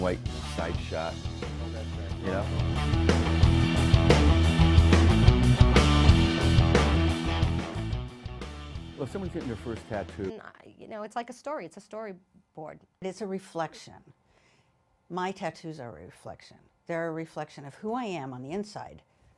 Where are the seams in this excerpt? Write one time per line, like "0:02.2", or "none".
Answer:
none